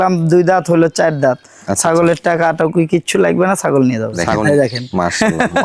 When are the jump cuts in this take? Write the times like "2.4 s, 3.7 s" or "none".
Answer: 4.4 s